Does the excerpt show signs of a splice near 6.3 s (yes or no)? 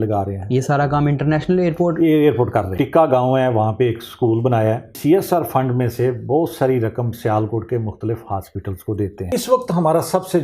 no